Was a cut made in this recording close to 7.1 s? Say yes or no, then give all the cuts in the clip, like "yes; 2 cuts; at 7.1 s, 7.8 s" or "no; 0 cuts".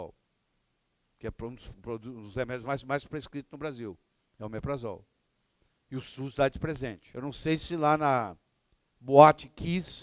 yes; 1 cut; at 7.1 s